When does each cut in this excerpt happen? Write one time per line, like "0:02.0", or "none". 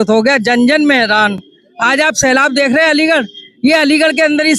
none